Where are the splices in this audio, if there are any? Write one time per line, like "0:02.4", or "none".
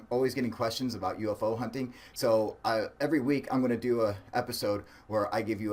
none